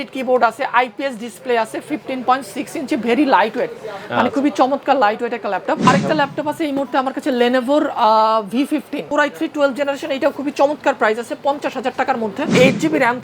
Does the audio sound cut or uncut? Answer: cut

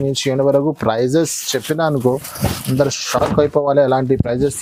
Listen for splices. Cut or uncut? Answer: uncut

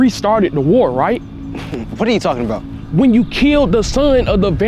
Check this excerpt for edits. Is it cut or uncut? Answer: cut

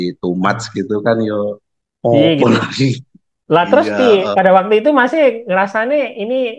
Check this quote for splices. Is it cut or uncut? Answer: uncut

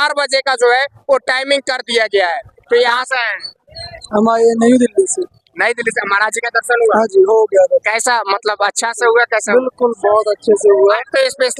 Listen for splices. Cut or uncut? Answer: cut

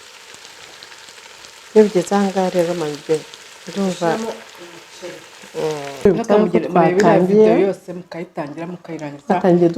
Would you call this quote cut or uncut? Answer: cut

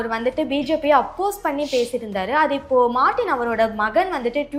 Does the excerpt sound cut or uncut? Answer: uncut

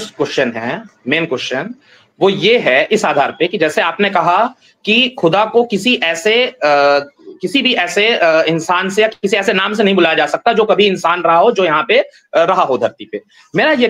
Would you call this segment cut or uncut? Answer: uncut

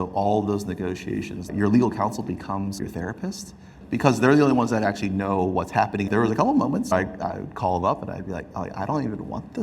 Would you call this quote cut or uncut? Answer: cut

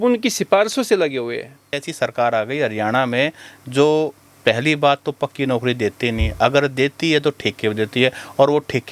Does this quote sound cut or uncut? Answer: cut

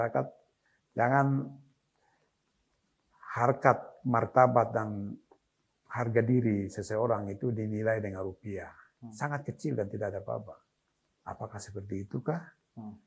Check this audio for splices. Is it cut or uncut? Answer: uncut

